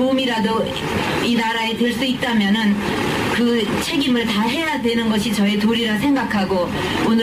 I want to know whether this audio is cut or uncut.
cut